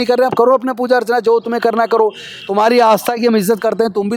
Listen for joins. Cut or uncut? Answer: uncut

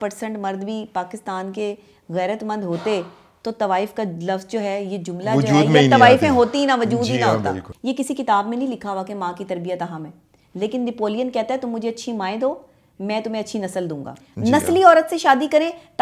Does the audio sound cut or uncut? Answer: cut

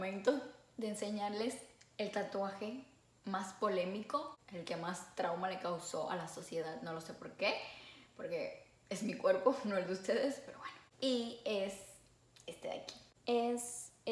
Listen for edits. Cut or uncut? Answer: uncut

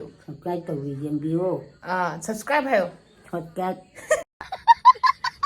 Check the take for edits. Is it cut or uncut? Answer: cut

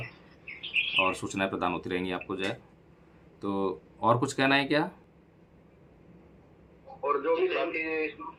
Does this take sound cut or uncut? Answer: uncut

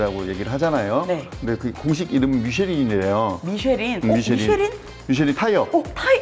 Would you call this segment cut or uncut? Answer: uncut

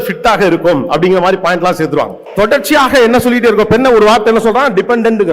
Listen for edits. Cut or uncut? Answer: cut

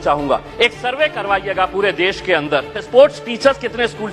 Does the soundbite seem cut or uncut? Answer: cut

